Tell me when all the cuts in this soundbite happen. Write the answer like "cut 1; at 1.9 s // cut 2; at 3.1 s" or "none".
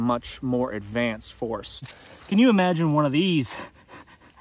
cut 1; at 1.7 s